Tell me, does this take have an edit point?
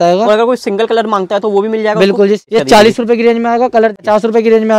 yes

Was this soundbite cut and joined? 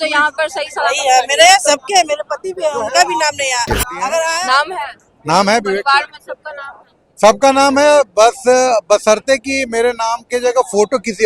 yes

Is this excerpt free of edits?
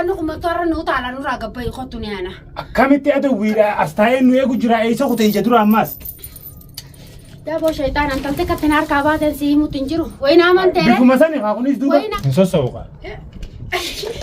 no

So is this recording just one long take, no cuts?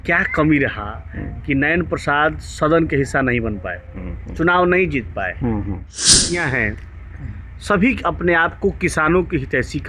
no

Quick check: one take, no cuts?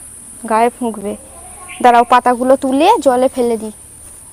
yes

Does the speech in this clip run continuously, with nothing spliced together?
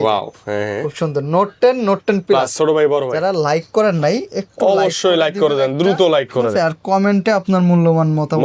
yes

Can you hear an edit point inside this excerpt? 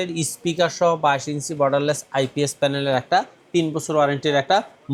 no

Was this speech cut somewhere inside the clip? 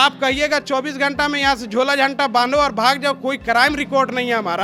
no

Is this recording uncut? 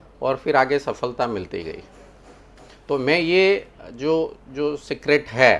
yes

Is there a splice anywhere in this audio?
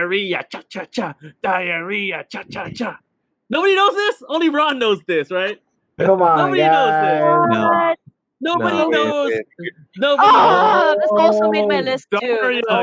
no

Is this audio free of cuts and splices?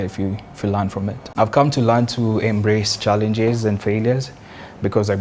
no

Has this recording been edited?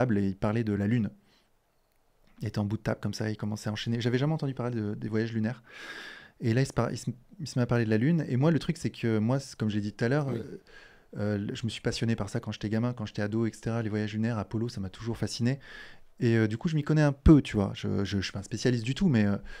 no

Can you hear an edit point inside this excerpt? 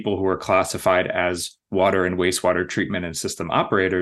no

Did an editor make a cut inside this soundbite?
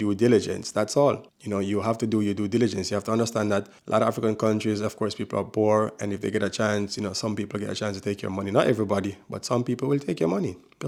no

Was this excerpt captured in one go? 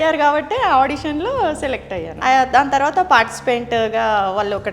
no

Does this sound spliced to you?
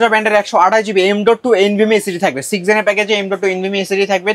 no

